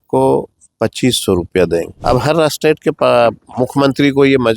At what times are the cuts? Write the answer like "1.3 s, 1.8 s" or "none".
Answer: 1.9 s, 3.0 s